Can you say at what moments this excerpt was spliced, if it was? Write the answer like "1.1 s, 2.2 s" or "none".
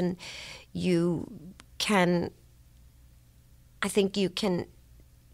none